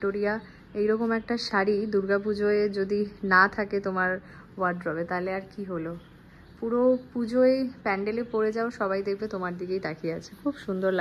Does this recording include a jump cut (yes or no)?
no